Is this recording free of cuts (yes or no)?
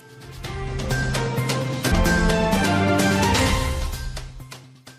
no